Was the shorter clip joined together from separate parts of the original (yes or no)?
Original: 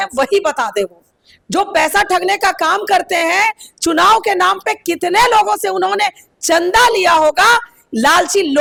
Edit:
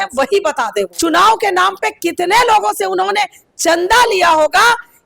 yes